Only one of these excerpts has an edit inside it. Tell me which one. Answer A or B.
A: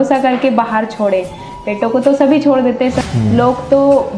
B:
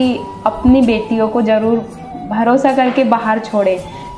A